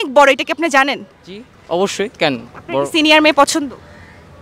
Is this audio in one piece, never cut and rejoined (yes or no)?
yes